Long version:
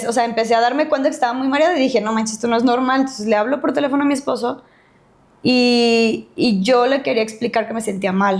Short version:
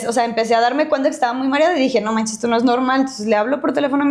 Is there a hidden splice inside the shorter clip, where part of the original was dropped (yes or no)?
no